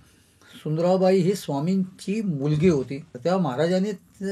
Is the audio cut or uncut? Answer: cut